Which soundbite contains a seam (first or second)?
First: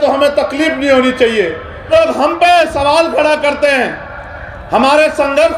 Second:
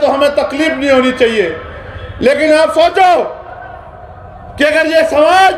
first